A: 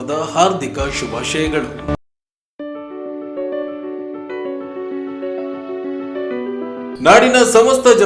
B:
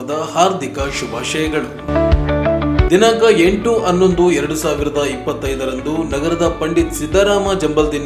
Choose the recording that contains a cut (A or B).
A